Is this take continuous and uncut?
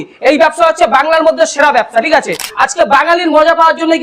no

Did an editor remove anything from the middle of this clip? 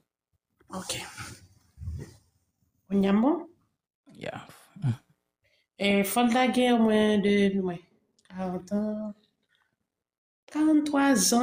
yes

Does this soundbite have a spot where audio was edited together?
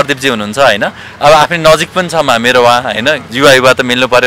no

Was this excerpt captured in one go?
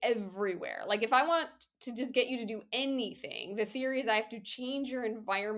yes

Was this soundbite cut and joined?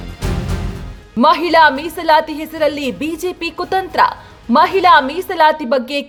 no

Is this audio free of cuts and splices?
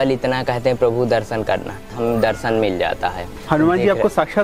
no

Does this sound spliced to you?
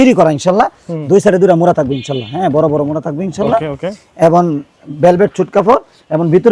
no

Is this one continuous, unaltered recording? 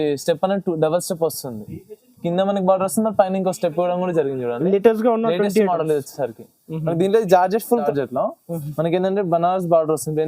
no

